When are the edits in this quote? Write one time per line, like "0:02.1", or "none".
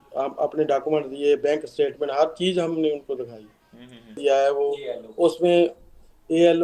0:04.2